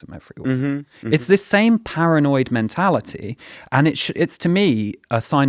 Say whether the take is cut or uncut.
uncut